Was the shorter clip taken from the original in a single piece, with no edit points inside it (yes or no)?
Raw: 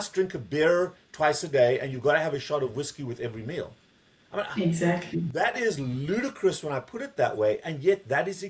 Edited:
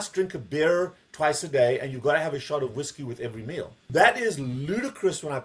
no